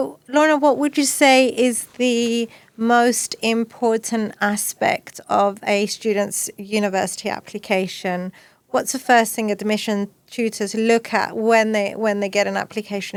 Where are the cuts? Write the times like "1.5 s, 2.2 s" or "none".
none